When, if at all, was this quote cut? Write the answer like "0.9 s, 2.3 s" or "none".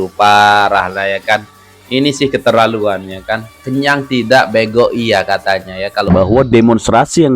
6.1 s